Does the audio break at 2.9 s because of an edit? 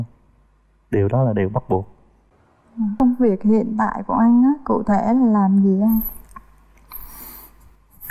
yes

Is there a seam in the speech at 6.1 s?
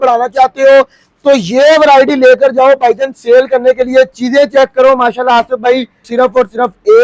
yes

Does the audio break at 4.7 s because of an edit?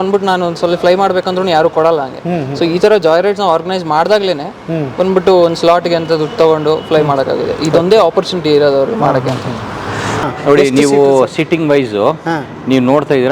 no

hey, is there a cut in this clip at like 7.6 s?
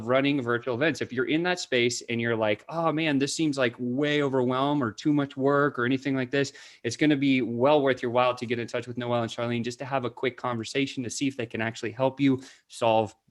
no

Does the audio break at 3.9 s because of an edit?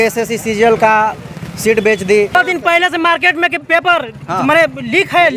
no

